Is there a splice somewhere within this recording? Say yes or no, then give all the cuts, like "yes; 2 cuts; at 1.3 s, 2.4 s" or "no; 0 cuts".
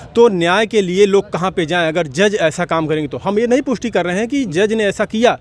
no; 0 cuts